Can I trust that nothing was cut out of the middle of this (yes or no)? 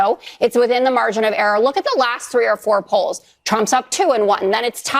yes